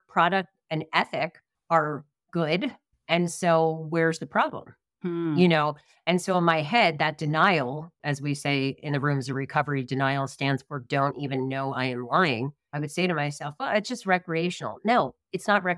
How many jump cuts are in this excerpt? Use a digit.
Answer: 0